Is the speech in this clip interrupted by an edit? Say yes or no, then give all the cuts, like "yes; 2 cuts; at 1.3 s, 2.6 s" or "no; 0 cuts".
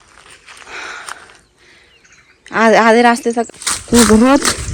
yes; 1 cut; at 3.5 s